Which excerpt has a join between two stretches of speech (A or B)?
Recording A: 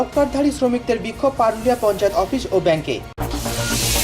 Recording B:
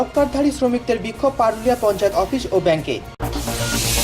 A